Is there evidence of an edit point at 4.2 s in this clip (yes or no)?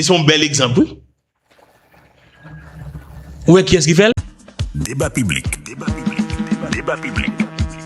yes